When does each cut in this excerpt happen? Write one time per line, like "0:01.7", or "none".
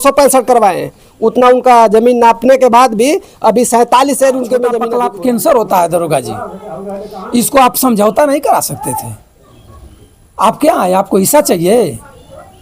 0:04.9